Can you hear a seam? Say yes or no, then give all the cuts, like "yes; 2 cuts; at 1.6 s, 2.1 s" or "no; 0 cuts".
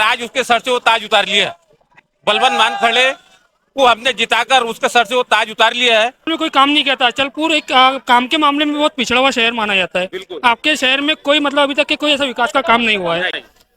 yes; 1 cut; at 6.3 s